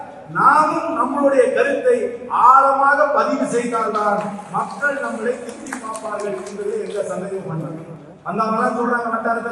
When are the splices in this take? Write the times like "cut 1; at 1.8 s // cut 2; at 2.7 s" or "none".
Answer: none

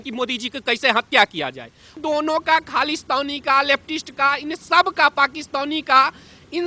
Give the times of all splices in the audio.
cut 1; at 2.0 s

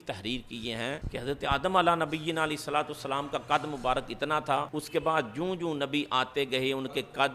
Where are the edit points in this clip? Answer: cut 1; at 1.0 s // cut 2; at 4.8 s

